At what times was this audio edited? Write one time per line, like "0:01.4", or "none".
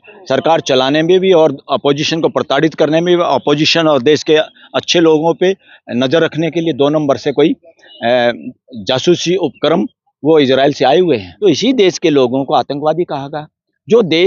0:11.3